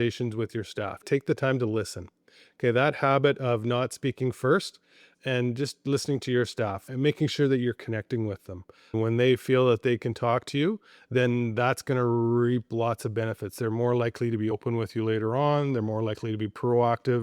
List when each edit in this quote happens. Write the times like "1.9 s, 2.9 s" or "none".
1.0 s